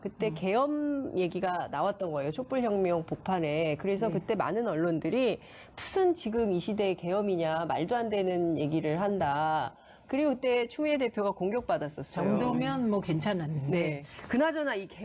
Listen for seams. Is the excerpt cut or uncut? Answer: cut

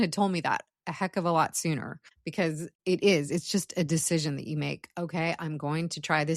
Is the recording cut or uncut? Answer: cut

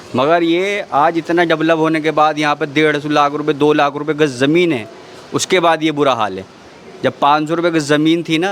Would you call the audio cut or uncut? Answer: uncut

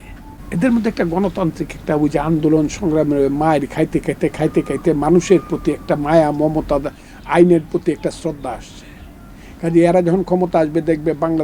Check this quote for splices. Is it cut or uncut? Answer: uncut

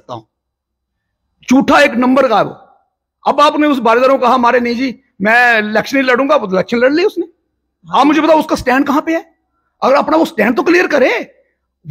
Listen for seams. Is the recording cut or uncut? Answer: uncut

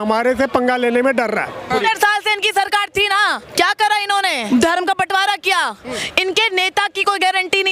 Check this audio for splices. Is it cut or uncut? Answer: cut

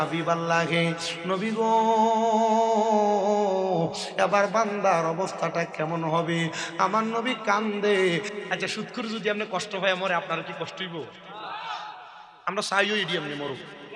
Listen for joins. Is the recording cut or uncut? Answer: cut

